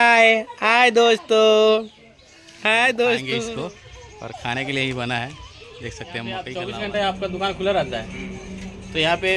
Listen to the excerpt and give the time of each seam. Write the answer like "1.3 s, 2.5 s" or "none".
3.5 s, 6.5 s